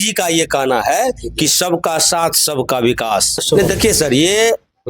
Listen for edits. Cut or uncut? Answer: cut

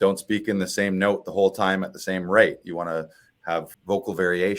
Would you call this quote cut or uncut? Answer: cut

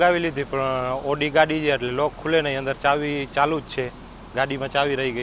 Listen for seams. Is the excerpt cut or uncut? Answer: uncut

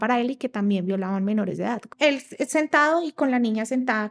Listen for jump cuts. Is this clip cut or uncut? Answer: cut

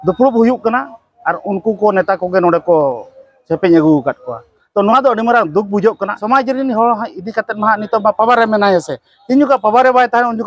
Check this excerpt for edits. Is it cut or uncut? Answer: cut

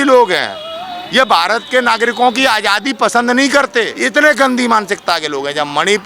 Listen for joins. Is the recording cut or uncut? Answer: cut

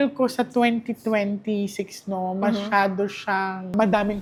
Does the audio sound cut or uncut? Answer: uncut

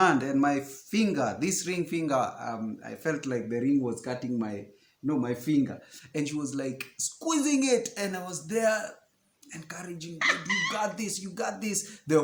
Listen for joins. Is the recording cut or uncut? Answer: uncut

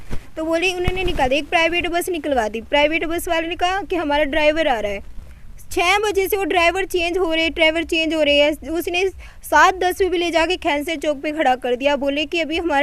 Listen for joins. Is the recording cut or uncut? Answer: uncut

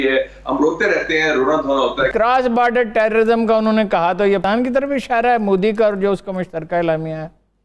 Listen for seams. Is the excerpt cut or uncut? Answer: cut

